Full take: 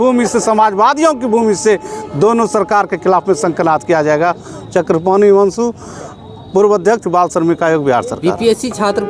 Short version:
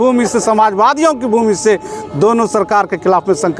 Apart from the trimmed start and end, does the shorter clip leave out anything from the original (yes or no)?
no